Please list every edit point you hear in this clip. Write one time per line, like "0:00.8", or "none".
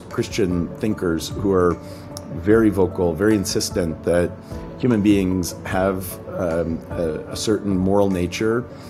none